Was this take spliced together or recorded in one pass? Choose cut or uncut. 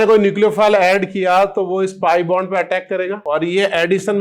cut